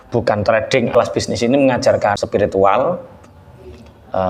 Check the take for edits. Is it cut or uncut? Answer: cut